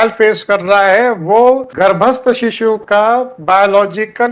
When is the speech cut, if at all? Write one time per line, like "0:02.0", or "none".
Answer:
0:01.7

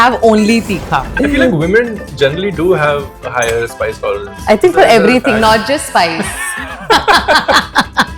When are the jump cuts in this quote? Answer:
0:01.1

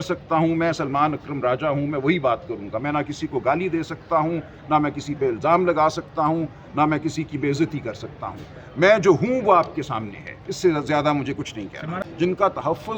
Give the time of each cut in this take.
0:12.0

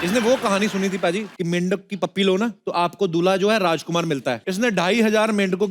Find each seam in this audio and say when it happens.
0:01.3
0:02.6
0:04.5

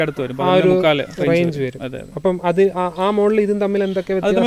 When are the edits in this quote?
none

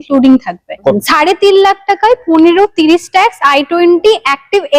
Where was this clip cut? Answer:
0:01.0

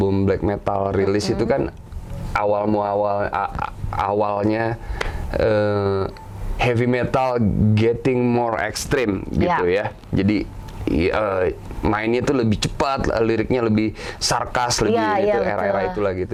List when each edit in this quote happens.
none

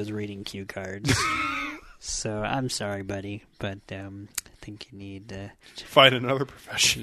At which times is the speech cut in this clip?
0:05.6

